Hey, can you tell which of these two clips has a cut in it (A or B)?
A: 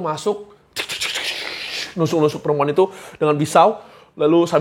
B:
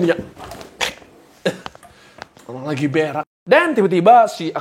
B